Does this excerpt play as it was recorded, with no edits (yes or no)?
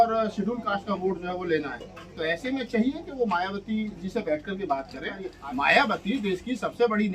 no